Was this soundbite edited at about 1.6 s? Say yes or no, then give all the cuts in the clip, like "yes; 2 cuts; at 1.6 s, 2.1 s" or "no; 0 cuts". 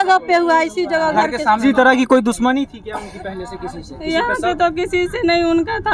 yes; 1 cut; at 1.6 s